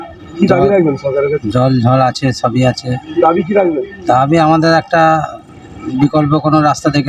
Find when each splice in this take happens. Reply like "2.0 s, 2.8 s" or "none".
none